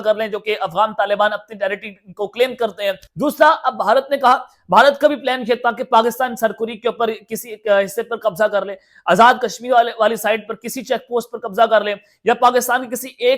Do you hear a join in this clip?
yes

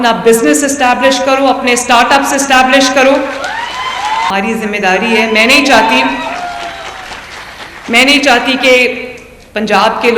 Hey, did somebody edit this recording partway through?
yes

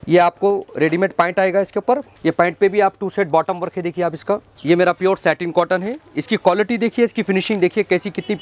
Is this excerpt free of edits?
no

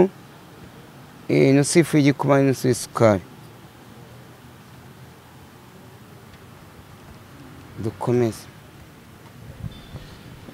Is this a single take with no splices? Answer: yes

